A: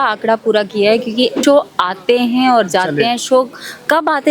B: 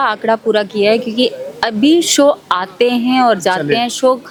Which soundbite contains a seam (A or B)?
A